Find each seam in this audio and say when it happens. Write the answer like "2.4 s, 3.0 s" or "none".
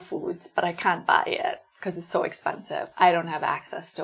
none